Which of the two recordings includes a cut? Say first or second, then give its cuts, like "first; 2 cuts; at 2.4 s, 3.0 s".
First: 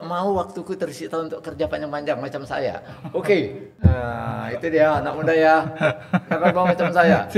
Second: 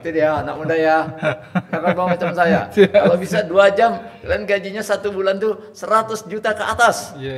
first; 1 cut; at 3.6 s